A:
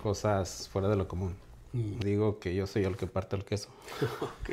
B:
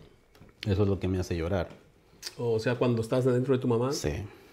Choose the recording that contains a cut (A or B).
A